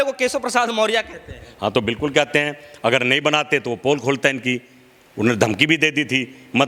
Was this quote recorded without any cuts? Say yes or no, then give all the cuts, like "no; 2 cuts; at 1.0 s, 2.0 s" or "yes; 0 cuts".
yes; 0 cuts